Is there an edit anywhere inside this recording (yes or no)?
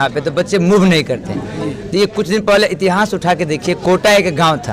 no